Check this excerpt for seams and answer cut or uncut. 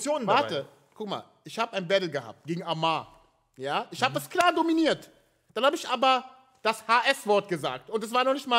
uncut